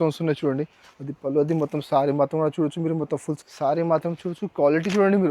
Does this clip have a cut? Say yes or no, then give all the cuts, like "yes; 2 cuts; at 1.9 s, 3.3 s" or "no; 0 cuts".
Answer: yes; 1 cut; at 3.3 s